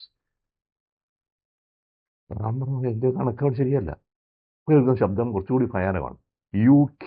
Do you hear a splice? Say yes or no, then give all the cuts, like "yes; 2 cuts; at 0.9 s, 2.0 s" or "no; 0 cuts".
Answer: no; 0 cuts